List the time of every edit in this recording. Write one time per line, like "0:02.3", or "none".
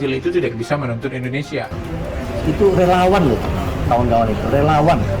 0:01.7